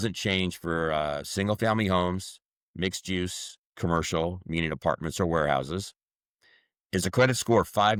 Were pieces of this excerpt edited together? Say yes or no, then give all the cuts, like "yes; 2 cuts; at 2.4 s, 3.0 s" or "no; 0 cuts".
no; 0 cuts